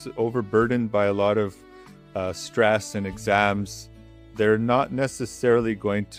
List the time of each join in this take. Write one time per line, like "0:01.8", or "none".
none